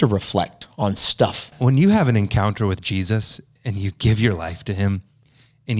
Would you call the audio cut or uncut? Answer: cut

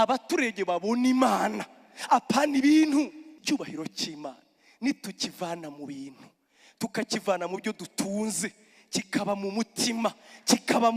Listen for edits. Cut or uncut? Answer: cut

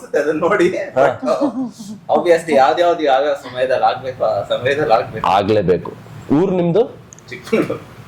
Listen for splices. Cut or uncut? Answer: uncut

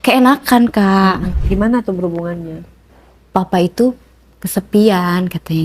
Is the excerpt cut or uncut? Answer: cut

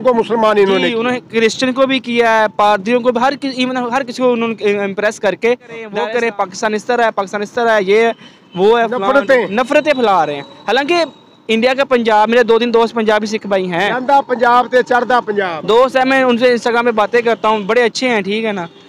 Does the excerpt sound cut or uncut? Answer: cut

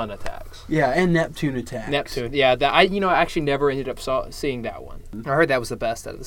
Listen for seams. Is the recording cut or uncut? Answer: cut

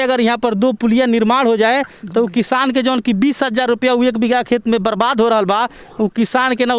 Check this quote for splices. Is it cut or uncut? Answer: uncut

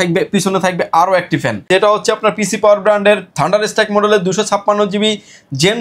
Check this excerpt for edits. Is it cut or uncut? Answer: cut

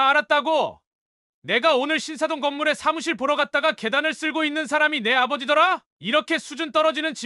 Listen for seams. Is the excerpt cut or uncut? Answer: cut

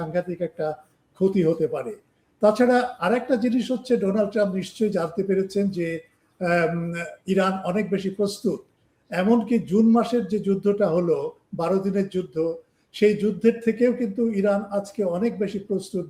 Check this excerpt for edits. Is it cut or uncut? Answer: uncut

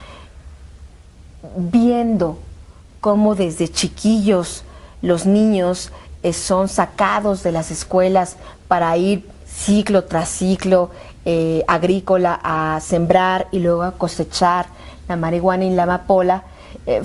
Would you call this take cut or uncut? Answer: uncut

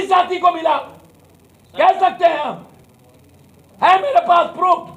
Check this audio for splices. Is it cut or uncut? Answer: uncut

